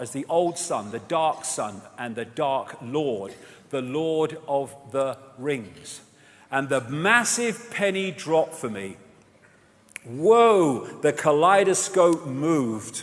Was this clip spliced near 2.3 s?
no; 1 cut; at 6.2 s

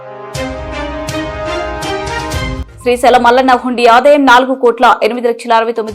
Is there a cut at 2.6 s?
yes; 2 cuts; at 2.0 s, 2.6 s

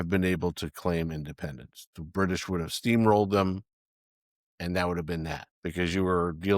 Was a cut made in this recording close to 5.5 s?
yes; 1 cut; at 5.5 s

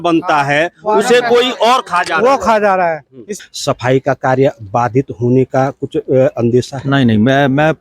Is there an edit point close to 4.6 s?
no; 1 cut; at 3.4 s

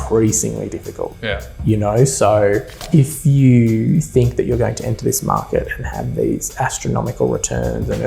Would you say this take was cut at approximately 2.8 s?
yes; 1 cut; at 2.8 s

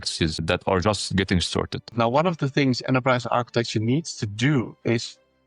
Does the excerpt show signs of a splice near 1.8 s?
yes; 1 cut; at 1.8 s

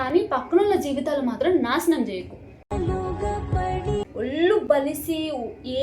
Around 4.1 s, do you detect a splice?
yes; 1 cut; at 4.1 s

